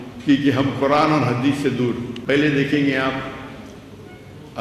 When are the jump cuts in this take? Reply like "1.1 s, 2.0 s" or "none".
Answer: 2.1 s